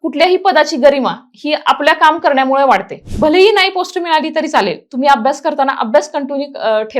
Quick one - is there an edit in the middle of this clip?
yes; 1 cut; at 3.0 s

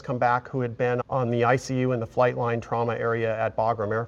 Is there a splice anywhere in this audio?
no; 0 cuts

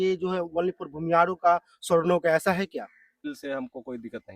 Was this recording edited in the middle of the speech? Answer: yes; 1 cut; at 3.3 s

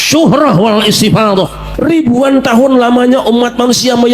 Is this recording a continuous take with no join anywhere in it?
no; 1 cut; at 1.6 s

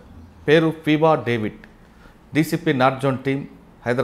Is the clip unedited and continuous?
yes; 0 cuts

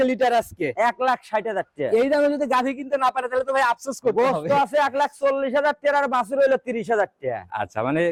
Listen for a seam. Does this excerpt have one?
no; 0 cuts

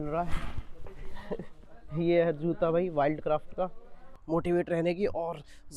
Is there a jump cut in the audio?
yes; 1 cut; at 4.2 s

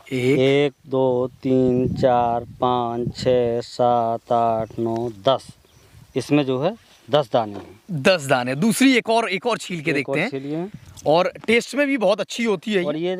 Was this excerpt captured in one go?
yes; 0 cuts

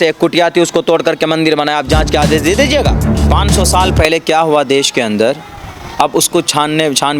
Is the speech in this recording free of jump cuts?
no; 1 cut; at 3.1 s

